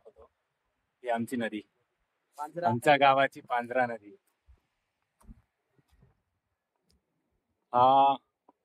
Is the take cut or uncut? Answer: uncut